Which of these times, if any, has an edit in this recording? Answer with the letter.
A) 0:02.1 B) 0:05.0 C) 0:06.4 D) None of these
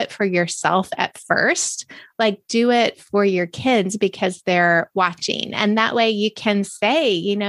D